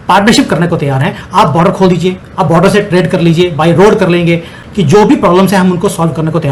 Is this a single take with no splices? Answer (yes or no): yes